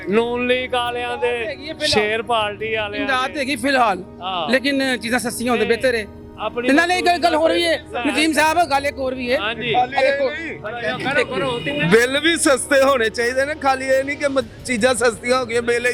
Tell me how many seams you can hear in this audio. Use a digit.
0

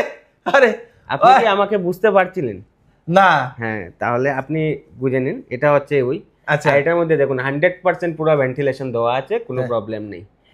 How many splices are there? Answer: 0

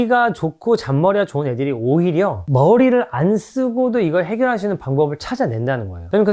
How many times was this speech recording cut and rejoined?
0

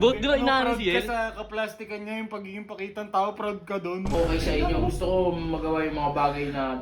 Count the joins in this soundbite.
1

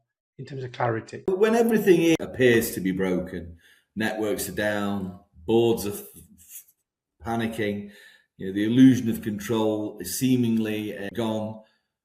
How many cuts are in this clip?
3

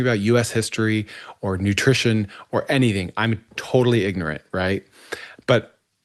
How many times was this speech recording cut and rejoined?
0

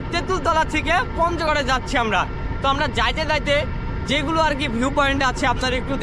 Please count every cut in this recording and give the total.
0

